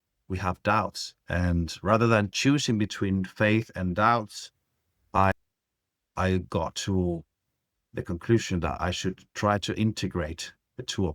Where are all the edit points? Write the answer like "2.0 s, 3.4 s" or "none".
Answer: 5.3 s

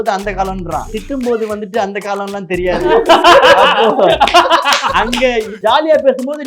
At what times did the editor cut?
1.0 s, 5.5 s

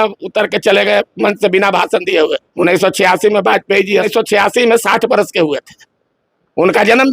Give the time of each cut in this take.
2.4 s, 4.1 s

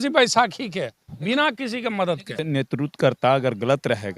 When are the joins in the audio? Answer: 2.4 s

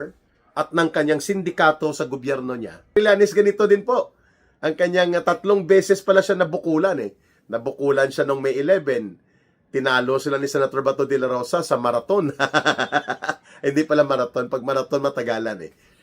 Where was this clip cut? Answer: 3.0 s

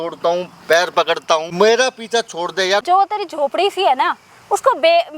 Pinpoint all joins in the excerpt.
1.5 s, 2.8 s

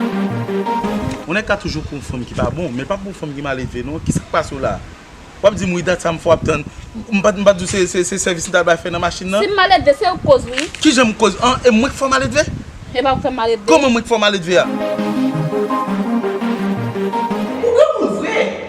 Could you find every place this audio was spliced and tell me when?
none

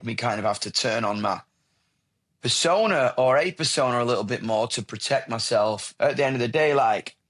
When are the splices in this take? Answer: 5.9 s

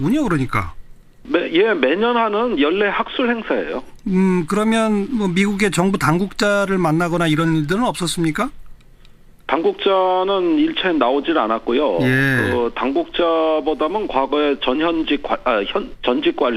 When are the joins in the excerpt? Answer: 10.8 s

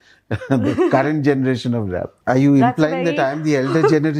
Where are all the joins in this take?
2.1 s

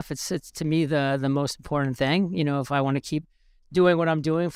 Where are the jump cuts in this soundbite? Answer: none

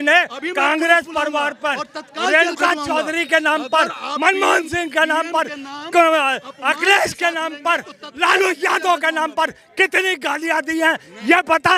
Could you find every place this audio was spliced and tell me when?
none

